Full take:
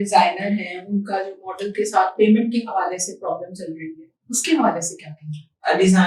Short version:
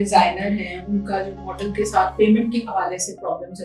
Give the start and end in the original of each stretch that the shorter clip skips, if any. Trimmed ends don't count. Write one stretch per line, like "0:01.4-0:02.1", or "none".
none